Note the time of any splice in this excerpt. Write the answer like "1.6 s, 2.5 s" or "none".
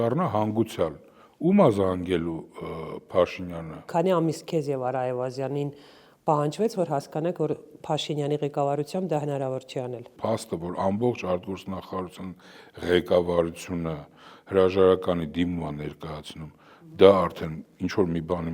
3.7 s, 10.1 s